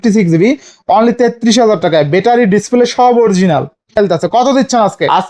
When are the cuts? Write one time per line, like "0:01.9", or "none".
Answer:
0:04.0

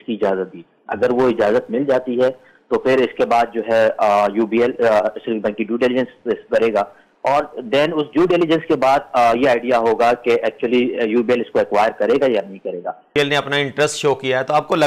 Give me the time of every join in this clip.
0:13.1

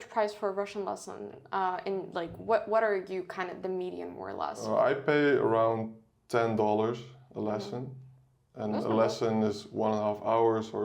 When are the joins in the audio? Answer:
0:04.6

